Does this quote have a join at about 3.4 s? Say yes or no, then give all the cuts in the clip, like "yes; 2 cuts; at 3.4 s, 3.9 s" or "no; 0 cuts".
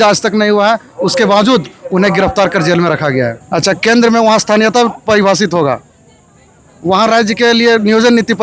yes; 1 cut; at 3.4 s